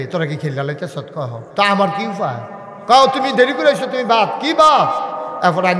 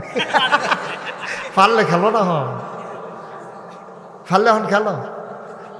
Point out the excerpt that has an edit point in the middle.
first; 1 cut; at 1.4 s

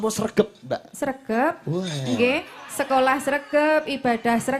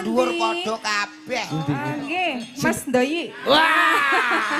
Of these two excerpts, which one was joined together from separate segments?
second; 1 cut; at 1.5 s

